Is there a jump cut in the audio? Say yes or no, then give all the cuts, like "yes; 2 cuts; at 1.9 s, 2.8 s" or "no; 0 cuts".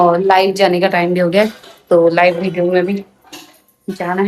no; 0 cuts